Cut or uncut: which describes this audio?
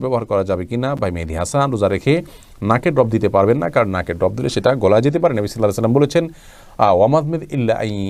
uncut